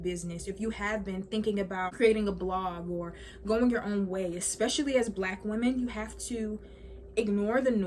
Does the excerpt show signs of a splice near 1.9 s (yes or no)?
yes